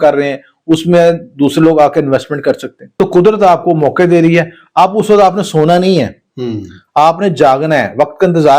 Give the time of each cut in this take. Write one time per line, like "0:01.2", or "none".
0:02.8